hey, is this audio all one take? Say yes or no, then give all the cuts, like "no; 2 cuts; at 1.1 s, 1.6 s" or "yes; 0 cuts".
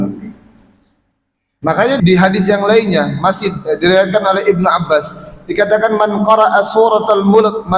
no; 1 cut; at 2.0 s